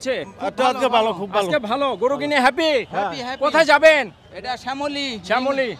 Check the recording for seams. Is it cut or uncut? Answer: uncut